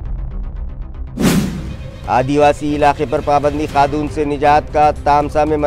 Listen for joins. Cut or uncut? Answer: cut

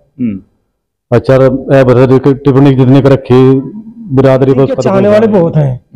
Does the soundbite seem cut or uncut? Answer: cut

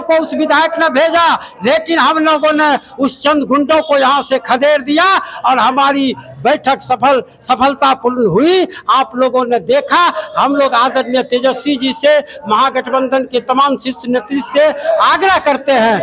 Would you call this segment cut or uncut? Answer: uncut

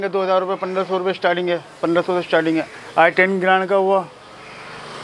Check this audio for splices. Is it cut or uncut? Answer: uncut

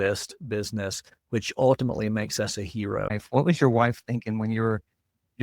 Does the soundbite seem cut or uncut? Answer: cut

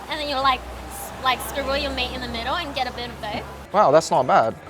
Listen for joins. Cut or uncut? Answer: cut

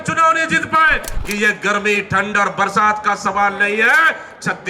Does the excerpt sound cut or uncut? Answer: cut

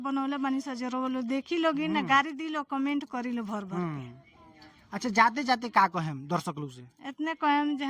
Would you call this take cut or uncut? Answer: uncut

